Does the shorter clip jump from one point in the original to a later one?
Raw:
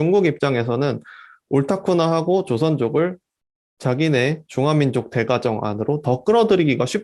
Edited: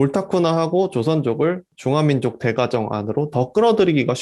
yes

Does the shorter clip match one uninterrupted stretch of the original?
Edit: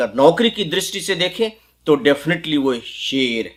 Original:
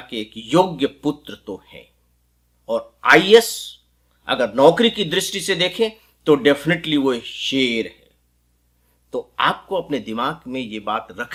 yes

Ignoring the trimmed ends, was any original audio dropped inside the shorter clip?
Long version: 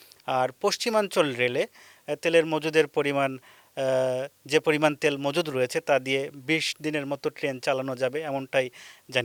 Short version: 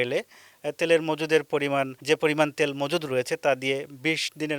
yes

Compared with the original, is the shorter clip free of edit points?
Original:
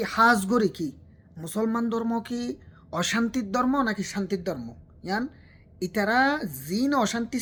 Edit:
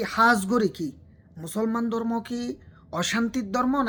yes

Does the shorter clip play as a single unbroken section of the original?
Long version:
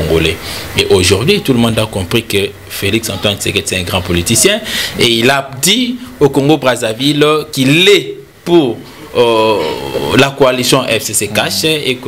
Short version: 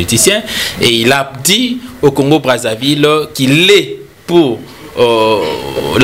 yes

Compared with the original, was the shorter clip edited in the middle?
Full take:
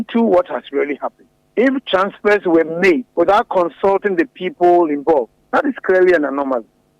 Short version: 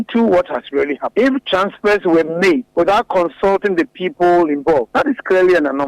yes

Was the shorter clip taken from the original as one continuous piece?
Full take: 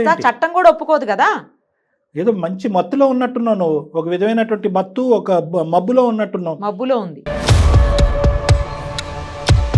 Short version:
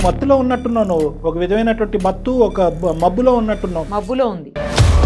yes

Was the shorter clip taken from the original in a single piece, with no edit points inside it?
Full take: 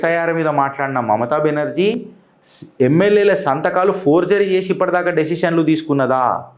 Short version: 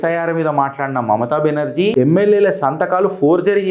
no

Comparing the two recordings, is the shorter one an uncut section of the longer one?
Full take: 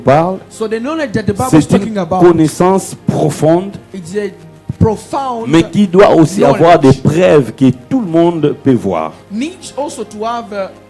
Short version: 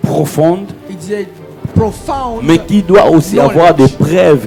yes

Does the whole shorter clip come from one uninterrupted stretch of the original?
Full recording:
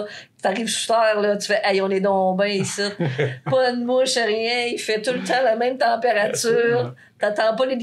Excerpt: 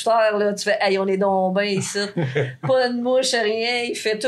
yes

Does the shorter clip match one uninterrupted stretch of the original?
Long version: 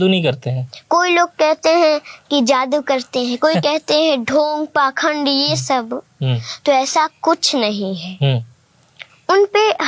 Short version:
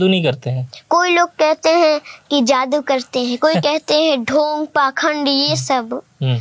yes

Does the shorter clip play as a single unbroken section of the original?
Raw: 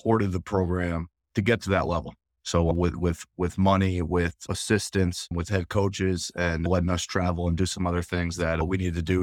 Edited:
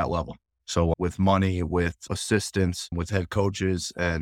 no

